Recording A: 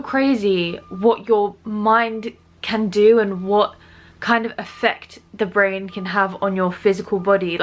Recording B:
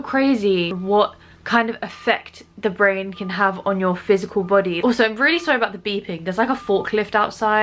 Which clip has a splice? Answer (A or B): B